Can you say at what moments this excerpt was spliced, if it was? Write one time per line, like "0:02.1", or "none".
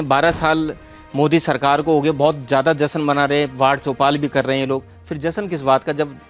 none